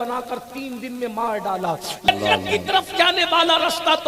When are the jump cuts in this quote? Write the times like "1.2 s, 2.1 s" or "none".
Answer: 2.1 s